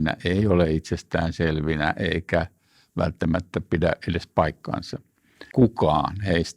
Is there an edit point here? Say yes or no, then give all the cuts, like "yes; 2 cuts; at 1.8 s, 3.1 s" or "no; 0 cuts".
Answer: yes; 1 cut; at 5.4 s